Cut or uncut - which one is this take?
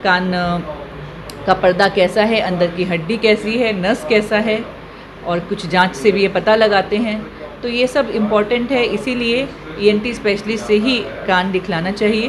uncut